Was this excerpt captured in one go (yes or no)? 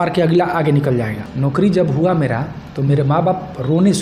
no